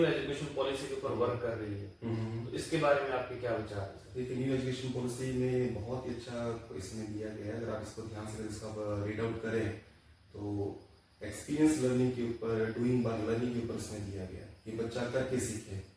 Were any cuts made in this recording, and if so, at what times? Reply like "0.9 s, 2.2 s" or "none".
none